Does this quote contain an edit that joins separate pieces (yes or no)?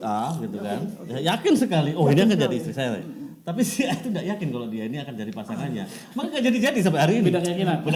no